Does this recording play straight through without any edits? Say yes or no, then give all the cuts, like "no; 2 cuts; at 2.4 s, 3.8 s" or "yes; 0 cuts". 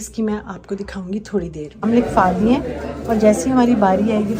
no; 1 cut; at 1.8 s